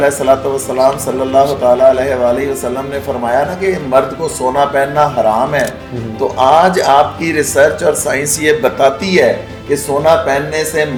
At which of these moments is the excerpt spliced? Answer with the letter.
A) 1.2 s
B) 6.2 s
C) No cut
C